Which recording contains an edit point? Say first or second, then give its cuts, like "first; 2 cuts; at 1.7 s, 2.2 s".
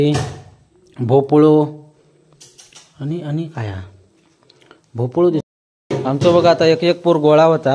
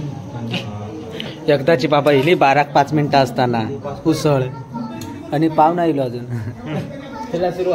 first; 1 cut; at 5.4 s